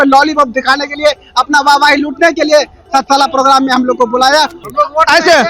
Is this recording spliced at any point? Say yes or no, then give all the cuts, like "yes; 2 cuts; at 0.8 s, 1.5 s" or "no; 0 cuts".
yes; 1 cut; at 4.6 s